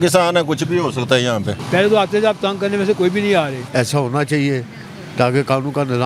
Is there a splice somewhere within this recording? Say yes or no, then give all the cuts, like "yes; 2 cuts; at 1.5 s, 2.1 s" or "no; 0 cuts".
yes; 2 cuts; at 1.6 s, 3.6 s